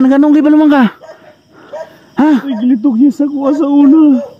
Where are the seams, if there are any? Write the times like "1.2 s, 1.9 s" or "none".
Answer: none